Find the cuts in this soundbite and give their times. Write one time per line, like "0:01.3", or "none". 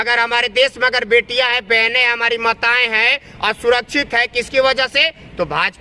none